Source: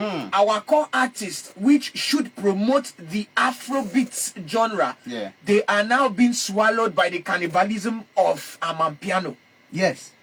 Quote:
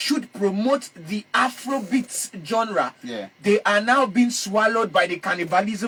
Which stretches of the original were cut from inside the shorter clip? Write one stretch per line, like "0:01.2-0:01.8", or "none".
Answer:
none